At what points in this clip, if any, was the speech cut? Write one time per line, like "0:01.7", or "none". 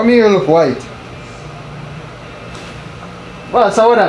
none